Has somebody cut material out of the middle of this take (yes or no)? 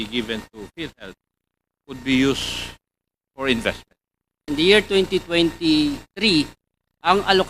yes